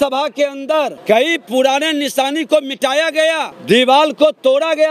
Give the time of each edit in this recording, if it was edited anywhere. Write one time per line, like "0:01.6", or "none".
0:01.0
0:03.5